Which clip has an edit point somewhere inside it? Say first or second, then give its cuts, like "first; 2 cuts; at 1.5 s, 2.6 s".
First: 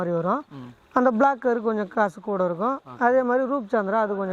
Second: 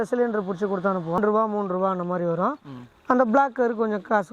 second; 1 cut; at 1.2 s